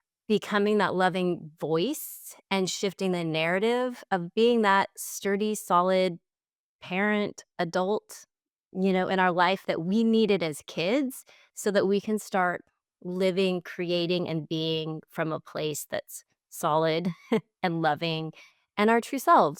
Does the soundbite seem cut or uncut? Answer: uncut